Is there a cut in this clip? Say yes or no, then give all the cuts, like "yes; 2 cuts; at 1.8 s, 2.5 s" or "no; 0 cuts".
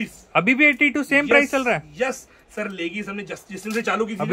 no; 0 cuts